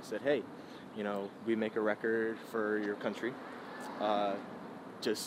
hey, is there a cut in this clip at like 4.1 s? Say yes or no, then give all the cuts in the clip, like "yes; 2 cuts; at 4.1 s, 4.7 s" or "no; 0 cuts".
no; 0 cuts